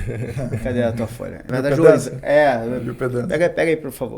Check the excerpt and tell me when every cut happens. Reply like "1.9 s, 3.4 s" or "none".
1.4 s